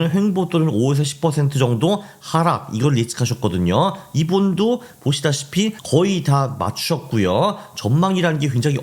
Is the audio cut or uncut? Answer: uncut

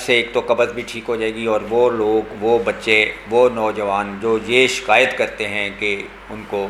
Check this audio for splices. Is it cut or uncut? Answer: uncut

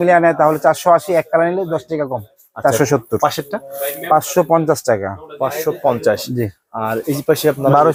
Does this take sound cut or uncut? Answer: uncut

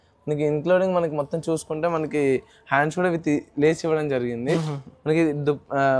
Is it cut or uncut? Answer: uncut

